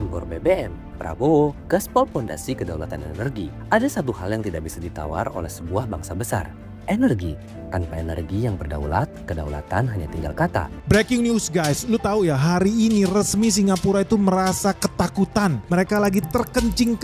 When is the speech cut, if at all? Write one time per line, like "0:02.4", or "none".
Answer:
0:10.9